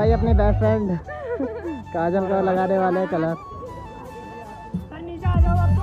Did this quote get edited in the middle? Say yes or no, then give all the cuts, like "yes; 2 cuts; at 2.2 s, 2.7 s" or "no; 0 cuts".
yes; 1 cut; at 3.5 s